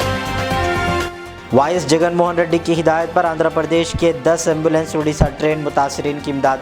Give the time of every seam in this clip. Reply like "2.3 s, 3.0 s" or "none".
1.0 s